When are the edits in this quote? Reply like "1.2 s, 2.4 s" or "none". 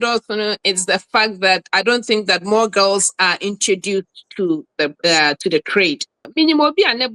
6.2 s